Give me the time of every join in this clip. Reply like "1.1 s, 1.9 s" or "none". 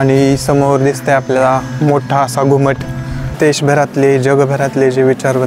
3.3 s